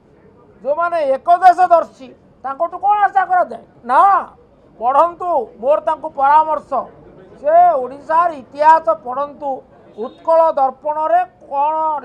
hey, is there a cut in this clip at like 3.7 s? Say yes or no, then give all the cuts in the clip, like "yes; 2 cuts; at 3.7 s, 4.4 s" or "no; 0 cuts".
yes; 1 cut; at 3.7 s